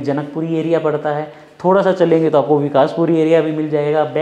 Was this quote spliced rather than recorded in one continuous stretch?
no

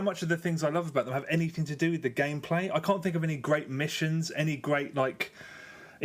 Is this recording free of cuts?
yes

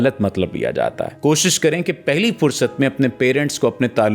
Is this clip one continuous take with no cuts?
no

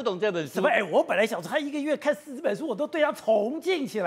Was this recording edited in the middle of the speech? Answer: no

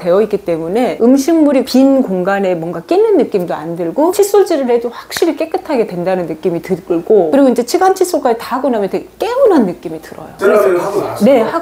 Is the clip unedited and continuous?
yes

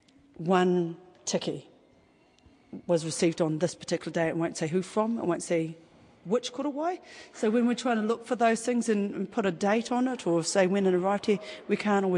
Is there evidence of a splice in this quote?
no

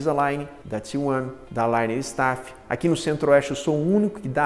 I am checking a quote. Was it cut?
no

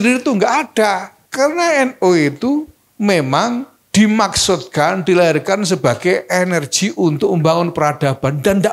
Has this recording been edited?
yes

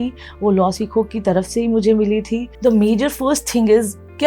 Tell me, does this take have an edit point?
yes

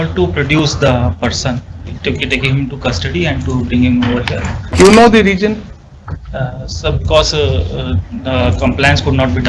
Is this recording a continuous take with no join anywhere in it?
no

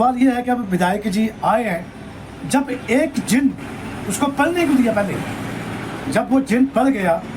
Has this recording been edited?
no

